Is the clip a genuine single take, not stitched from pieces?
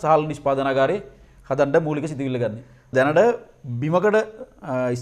no; 1 cut; at 2.9 s

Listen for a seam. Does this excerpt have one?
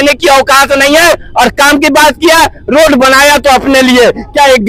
no; 0 cuts

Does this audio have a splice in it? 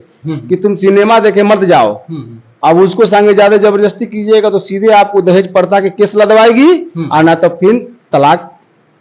no; 0 cuts

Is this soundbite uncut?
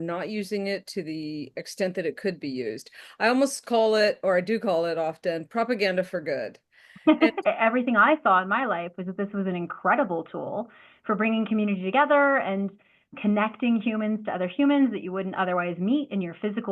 no; 1 cut; at 7.4 s

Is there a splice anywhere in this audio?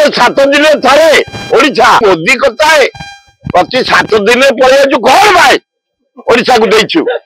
yes; 1 cut; at 2.0 s

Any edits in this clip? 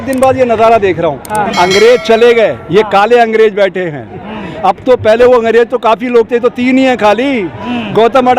yes; 1 cut; at 1.5 s

